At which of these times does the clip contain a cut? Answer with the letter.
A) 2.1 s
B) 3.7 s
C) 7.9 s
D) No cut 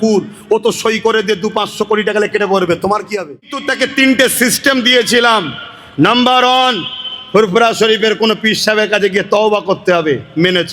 B